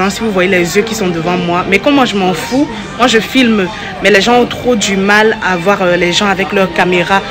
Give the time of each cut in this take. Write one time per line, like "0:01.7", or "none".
none